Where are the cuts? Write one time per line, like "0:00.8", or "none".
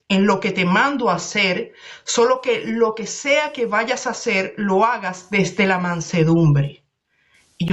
none